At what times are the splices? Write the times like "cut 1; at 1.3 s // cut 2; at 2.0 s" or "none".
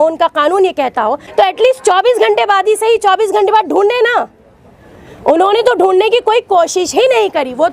cut 1; at 1.2 s